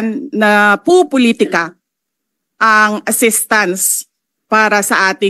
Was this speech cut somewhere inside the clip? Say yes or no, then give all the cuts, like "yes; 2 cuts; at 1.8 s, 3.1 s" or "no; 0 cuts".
no; 0 cuts